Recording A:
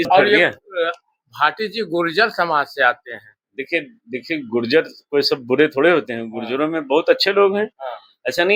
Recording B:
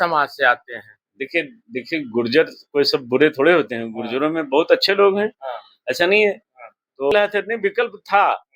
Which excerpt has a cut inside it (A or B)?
B